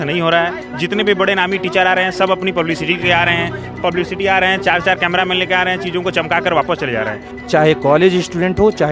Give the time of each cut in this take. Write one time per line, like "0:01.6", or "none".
0:07.3